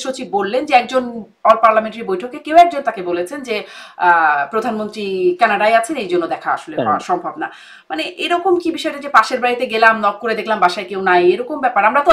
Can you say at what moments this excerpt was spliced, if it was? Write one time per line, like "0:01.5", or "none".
none